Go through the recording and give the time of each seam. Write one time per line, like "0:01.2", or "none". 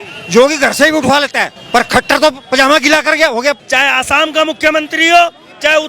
0:03.6